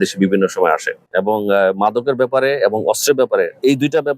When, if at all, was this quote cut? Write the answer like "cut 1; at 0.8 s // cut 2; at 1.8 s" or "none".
cut 1; at 1.0 s